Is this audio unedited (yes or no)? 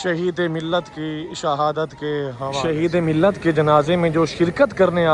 no